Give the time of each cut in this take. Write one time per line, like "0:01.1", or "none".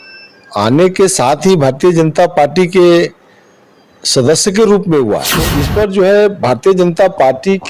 0:05.6